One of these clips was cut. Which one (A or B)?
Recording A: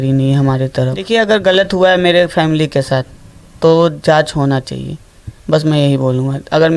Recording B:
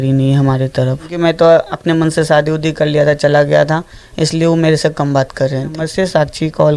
B